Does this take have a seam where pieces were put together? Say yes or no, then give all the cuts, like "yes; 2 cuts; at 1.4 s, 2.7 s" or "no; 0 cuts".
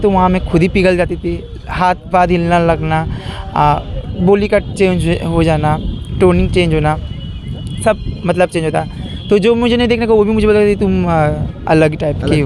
no; 0 cuts